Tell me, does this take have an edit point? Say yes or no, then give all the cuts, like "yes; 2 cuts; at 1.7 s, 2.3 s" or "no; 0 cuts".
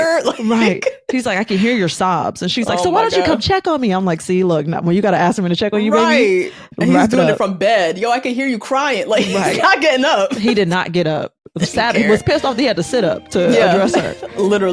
no; 0 cuts